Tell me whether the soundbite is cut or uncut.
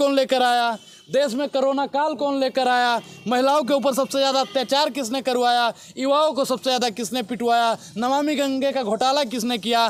uncut